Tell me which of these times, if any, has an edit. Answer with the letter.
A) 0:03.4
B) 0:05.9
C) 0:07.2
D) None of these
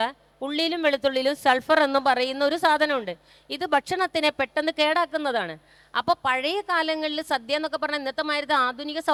D